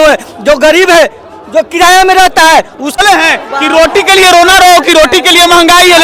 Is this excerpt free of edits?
no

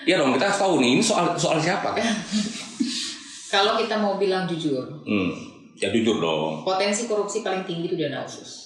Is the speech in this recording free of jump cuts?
yes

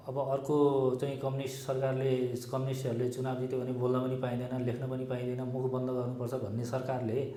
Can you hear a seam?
no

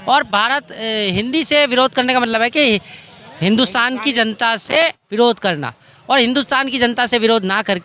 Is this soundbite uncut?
yes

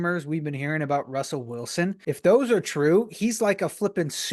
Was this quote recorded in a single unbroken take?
no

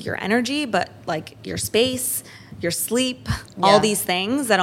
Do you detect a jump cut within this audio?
no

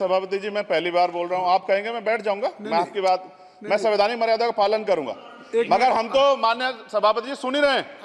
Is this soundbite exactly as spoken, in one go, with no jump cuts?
yes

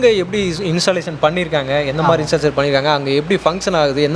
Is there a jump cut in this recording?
no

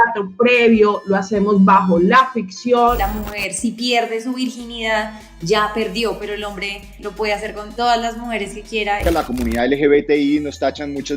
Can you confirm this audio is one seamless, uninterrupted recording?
no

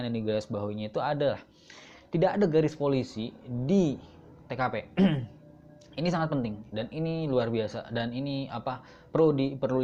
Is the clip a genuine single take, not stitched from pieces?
yes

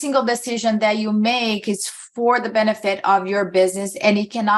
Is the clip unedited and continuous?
yes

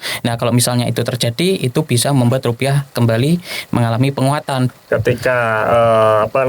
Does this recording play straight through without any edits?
no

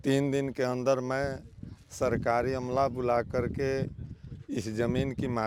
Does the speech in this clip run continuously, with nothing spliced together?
yes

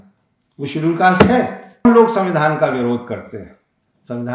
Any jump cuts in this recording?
yes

